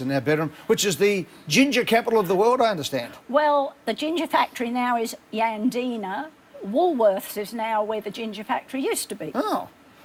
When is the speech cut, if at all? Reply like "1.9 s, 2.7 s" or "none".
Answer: none

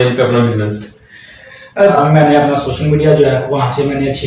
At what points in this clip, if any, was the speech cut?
1.9 s

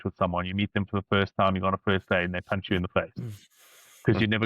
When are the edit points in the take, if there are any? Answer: none

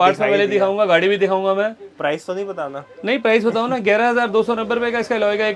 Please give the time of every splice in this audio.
none

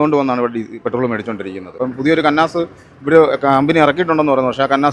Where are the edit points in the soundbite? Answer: 1.7 s

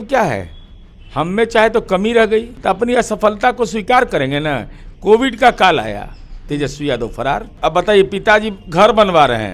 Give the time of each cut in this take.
2.5 s, 7.5 s

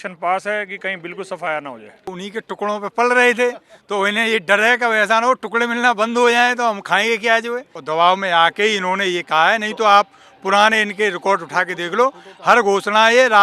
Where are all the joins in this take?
2.2 s, 7.7 s

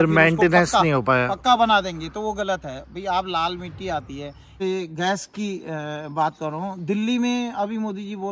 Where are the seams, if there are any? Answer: 4.5 s

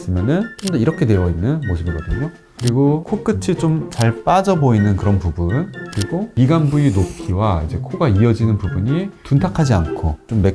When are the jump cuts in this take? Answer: none

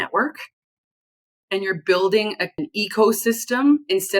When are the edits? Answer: 2.6 s

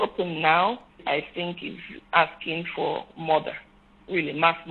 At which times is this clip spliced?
1.0 s, 1.9 s

